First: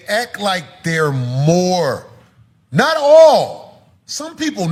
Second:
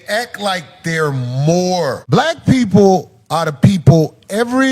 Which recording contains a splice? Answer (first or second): second